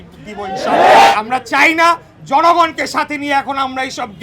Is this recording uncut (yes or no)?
no